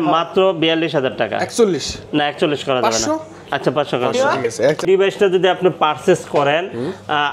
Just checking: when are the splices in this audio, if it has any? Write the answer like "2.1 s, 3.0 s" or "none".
4.8 s